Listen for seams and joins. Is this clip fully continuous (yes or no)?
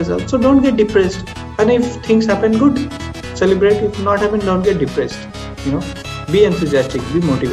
no